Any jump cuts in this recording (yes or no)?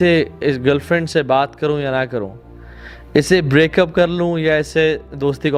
no